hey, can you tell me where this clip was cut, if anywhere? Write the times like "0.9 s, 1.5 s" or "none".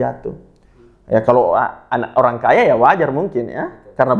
none